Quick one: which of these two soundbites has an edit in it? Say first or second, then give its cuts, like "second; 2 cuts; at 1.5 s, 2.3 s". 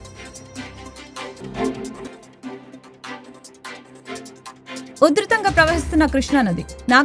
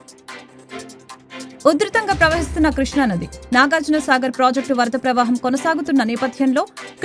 first; 1 cut; at 1.4 s